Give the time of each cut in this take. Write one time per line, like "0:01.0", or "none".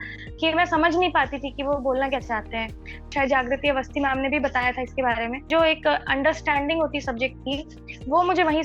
0:03.1
0:05.5

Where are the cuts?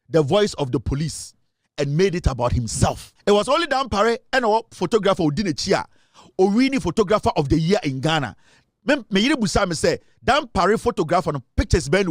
0:03.1

